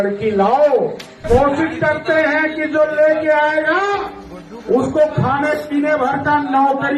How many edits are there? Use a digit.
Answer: 1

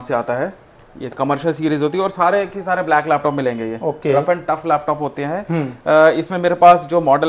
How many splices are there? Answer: 0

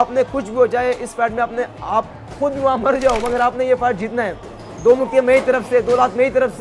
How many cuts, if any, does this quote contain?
0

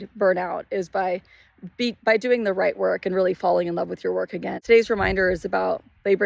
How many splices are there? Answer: 1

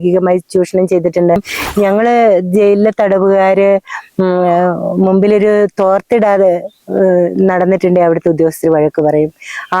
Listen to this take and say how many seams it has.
1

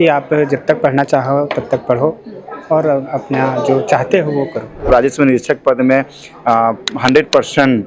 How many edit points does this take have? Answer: 1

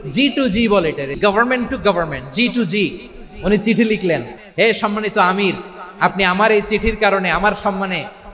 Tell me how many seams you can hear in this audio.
2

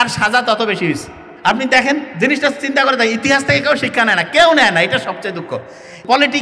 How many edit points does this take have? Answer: 0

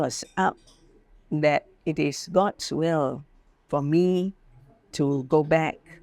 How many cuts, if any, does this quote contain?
0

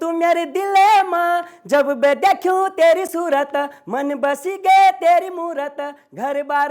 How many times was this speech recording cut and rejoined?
0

